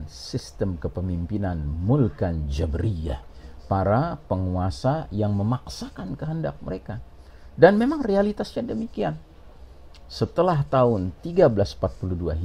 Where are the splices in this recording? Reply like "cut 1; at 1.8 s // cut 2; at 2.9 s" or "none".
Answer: none